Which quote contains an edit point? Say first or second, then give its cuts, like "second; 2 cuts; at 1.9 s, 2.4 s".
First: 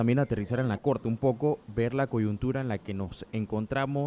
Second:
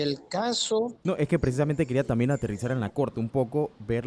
second; 1 cut; at 1.0 s